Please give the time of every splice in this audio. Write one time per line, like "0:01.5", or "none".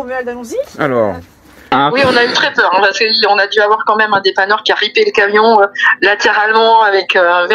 0:01.7

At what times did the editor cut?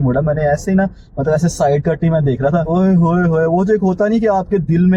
none

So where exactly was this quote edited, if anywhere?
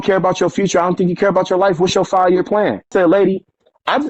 0:02.9

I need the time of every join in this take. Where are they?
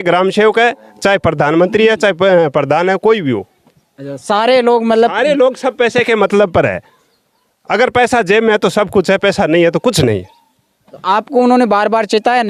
none

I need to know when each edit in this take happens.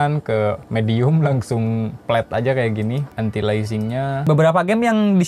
0:04.3

